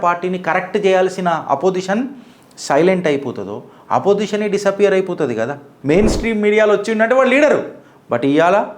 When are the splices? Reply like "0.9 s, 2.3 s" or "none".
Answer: 5.7 s